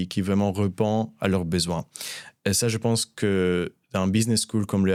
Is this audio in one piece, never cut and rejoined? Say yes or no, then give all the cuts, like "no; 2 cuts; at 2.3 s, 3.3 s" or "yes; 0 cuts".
yes; 0 cuts